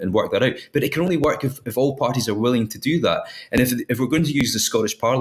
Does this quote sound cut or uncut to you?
uncut